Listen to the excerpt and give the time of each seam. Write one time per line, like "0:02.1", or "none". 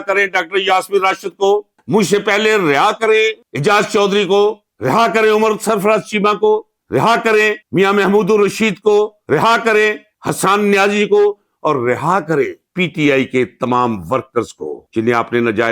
none